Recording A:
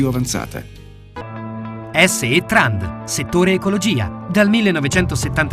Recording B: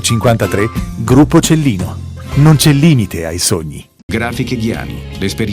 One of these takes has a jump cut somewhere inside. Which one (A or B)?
A